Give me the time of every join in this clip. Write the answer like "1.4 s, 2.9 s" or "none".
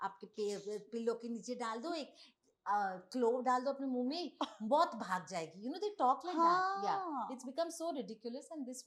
none